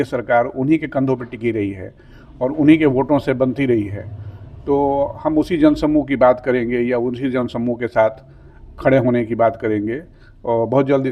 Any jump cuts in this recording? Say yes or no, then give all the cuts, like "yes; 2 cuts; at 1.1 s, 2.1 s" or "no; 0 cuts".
no; 0 cuts